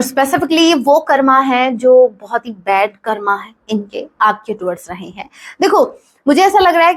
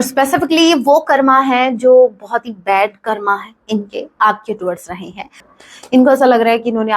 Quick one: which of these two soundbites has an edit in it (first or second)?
second